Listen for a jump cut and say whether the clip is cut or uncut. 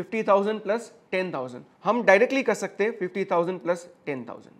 cut